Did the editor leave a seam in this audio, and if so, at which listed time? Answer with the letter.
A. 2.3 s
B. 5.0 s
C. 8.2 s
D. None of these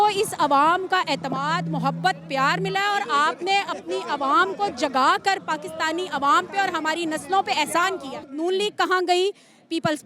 C